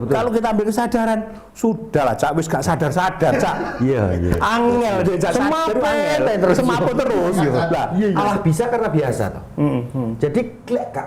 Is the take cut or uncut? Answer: cut